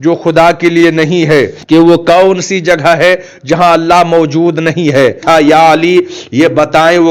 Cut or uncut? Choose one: cut